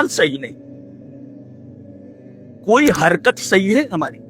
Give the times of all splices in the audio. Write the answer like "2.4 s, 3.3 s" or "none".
1.1 s, 2.6 s